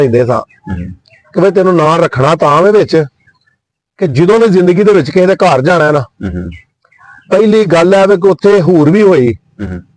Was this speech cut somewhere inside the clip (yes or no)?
no